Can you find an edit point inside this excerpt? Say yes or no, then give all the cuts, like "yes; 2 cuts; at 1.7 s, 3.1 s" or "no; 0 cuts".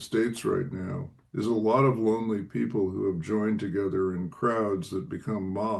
no; 0 cuts